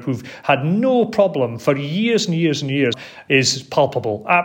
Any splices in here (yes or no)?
yes